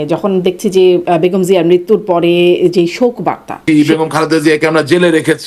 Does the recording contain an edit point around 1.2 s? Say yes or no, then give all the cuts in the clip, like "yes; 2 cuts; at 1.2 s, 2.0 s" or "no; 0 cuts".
no; 1 cut; at 3.6 s